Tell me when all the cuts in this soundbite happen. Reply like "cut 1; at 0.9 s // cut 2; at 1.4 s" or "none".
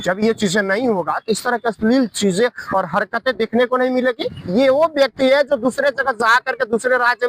cut 1; at 4.5 s